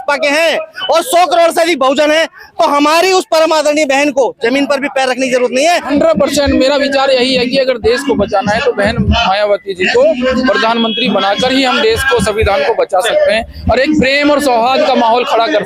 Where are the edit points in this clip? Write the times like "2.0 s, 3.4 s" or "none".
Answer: 5.9 s